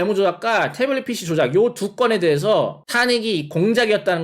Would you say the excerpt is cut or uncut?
cut